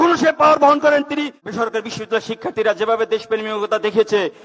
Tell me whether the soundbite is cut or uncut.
cut